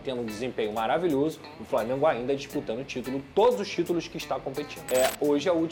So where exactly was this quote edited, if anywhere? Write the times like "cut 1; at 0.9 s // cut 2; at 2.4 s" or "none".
cut 1; at 4.8 s